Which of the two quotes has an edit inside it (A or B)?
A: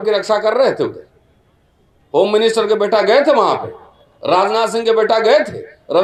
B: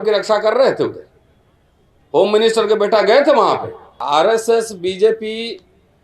B